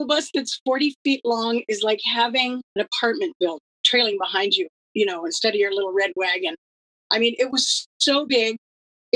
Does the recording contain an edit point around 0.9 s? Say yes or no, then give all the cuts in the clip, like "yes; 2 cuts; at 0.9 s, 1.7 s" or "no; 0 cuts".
no; 2 cuts; at 2.6 s, 3.7 s